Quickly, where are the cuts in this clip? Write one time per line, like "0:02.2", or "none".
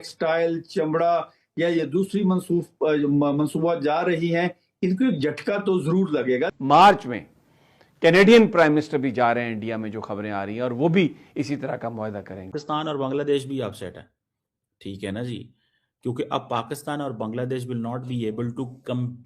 0:06.5
0:12.6